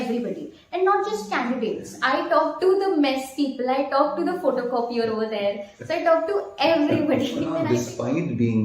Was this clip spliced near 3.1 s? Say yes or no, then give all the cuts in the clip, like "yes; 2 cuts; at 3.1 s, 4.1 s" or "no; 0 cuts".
no; 1 cut; at 7.6 s